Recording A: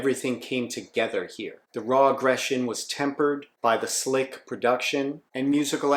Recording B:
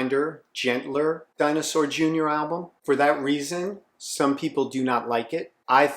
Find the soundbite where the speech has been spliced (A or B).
B